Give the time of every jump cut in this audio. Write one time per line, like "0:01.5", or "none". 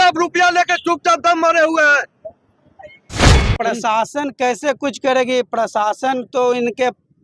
0:03.3